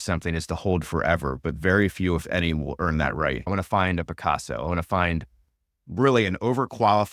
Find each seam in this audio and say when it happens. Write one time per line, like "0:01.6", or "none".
0:03.5